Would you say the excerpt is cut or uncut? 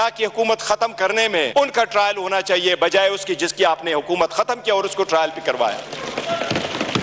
uncut